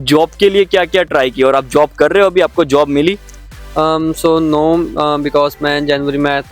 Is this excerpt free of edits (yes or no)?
yes